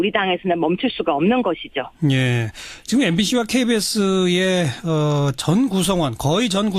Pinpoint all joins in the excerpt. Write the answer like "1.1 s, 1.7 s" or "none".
none